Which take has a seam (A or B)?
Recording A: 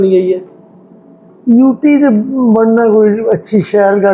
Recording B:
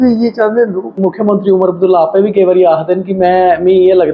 B